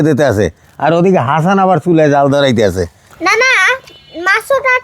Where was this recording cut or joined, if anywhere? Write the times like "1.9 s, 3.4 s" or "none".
2.9 s

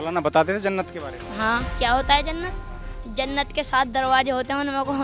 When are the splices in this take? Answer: 1.7 s

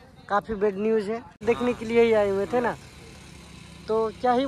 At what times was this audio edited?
1.4 s

